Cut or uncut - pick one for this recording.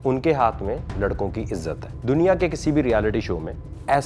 cut